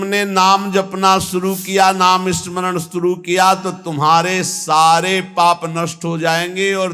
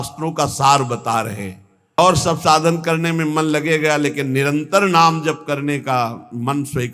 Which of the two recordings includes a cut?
second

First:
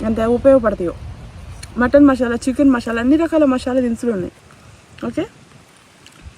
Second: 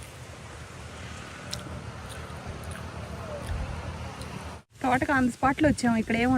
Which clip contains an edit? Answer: second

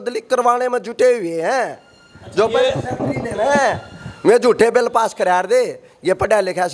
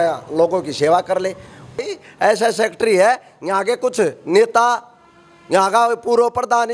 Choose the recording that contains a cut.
second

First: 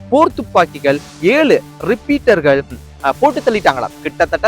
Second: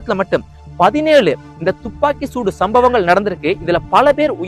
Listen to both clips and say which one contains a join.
first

